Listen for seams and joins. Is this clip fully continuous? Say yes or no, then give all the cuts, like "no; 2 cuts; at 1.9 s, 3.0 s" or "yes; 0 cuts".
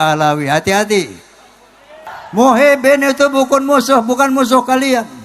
no; 1 cut; at 2.0 s